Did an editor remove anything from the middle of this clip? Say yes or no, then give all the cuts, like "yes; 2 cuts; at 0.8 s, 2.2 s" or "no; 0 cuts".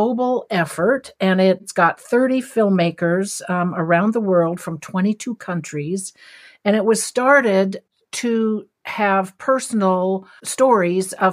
yes; 3 cuts; at 1.7 s, 7.8 s, 10.4 s